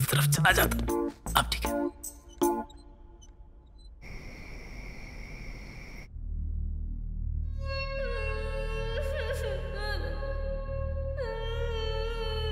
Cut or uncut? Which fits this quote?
uncut